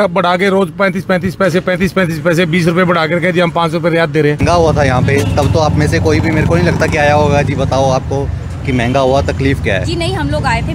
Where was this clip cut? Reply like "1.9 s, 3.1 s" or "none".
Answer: 4.4 s